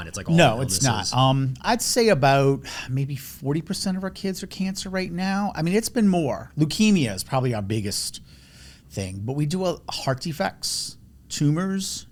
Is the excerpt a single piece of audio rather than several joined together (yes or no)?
yes